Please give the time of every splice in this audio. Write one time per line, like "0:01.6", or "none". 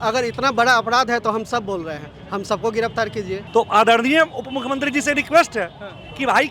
0:03.4